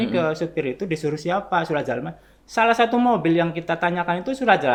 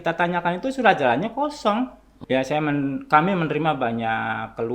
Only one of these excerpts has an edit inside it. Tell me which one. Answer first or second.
second